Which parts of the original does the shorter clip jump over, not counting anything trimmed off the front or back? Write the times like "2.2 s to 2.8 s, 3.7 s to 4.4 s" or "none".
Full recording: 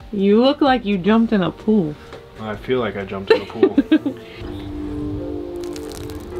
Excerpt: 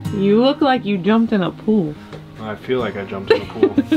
none